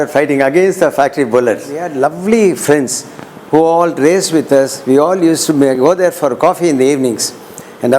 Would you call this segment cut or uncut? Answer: cut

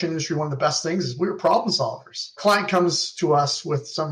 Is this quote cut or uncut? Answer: cut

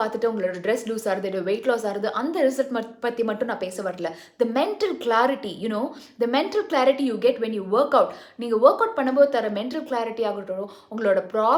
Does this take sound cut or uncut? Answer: uncut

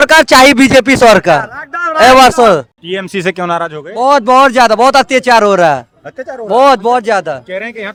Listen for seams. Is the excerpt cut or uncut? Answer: uncut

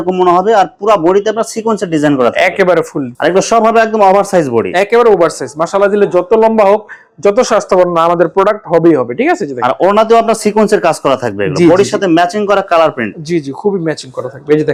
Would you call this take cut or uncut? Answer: uncut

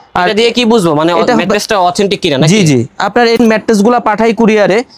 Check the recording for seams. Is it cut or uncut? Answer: cut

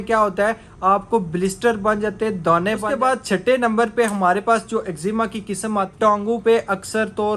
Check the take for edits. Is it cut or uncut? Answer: cut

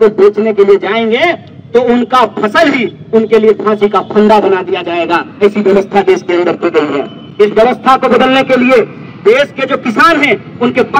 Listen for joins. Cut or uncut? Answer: uncut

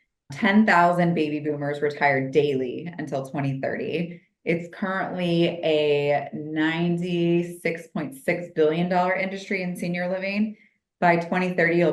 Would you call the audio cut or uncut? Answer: uncut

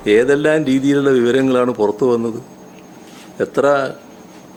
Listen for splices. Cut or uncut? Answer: uncut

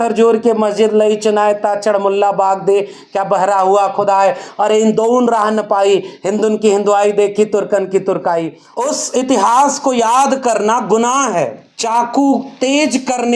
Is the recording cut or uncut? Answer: cut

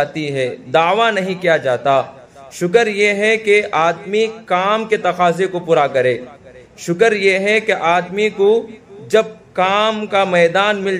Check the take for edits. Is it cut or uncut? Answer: uncut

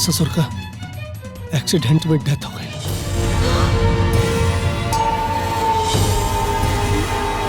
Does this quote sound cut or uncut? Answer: uncut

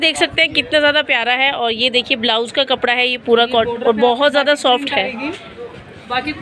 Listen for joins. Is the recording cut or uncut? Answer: uncut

